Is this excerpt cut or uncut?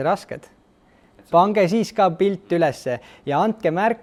uncut